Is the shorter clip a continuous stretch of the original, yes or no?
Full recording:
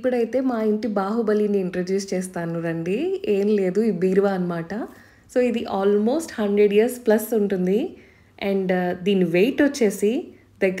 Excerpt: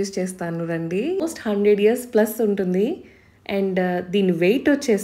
no